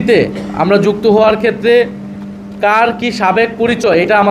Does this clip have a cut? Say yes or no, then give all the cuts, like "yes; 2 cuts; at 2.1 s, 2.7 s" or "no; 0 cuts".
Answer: no; 0 cuts